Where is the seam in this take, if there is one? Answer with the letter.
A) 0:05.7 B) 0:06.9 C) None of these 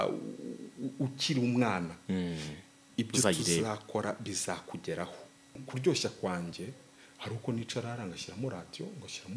A